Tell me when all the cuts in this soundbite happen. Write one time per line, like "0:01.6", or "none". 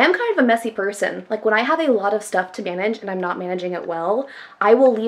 none